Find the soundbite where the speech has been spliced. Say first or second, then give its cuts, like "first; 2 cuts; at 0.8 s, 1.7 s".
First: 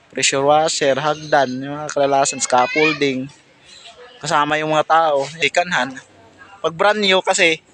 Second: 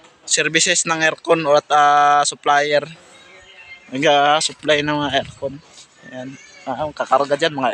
first; 1 cut; at 5.4 s